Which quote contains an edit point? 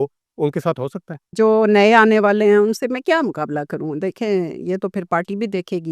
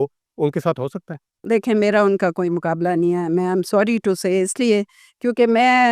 first; 1 cut; at 1.3 s

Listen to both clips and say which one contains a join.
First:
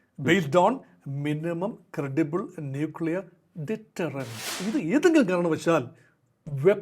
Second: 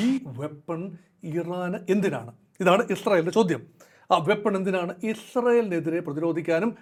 first; 1 cut; at 4.4 s

